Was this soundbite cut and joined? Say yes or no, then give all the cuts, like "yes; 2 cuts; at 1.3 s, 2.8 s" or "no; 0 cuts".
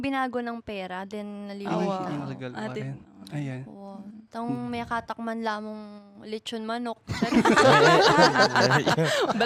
no; 0 cuts